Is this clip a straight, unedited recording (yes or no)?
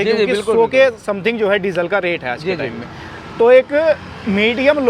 yes